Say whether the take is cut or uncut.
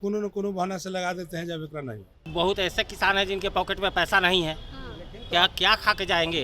cut